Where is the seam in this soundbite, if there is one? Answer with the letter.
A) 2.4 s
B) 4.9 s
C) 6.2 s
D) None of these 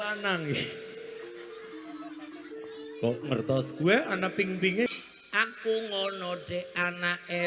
B